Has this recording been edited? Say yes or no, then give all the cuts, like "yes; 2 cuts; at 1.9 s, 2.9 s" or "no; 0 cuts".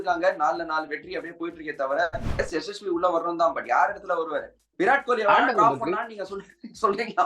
yes; 1 cut; at 2.4 s